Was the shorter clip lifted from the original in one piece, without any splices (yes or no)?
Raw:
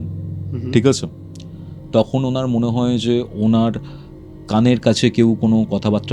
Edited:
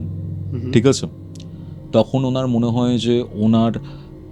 yes